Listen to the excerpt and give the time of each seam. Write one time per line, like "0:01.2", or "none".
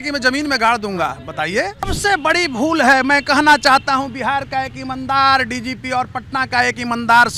0:01.9